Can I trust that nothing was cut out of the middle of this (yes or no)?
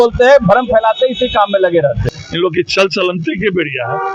no